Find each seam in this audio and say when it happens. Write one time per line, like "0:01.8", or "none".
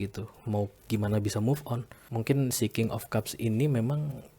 0:01.9